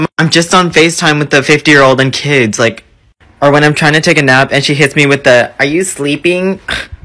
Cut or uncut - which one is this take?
uncut